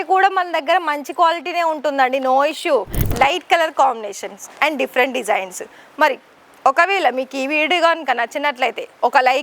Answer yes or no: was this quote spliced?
yes